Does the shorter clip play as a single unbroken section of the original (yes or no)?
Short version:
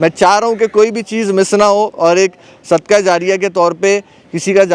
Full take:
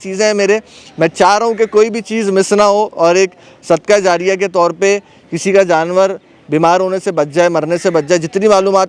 yes